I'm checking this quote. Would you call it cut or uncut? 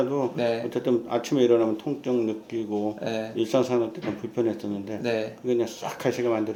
uncut